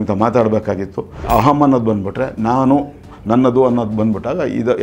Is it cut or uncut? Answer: cut